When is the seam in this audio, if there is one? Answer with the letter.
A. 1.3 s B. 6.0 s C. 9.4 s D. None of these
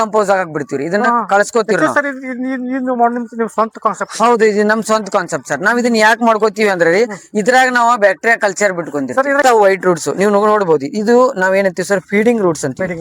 C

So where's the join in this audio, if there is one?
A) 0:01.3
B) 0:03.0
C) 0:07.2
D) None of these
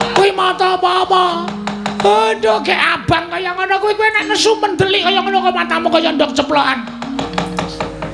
C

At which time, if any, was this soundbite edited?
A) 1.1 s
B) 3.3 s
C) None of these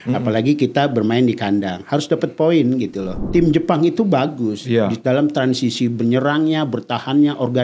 B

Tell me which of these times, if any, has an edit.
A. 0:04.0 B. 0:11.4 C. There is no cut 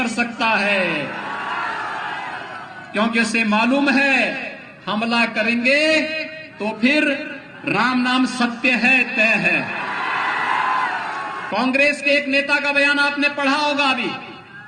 B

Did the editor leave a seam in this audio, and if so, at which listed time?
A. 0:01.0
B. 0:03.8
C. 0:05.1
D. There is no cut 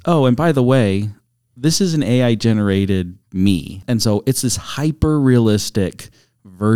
B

